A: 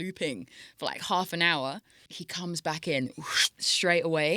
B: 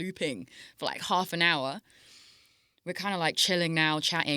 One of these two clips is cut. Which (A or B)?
A